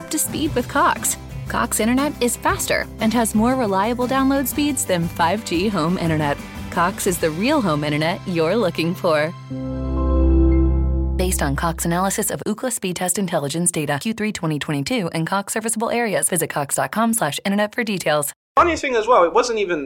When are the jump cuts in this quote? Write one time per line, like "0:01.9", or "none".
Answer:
0:18.5